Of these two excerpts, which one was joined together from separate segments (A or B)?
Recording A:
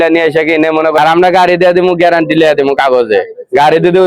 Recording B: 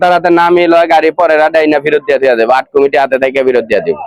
A